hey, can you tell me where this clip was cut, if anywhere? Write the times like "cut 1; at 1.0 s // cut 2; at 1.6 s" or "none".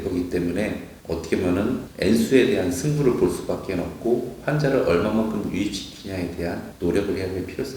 none